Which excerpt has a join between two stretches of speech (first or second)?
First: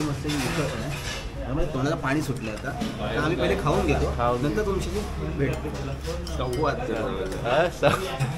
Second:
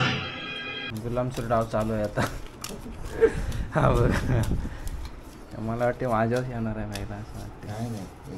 second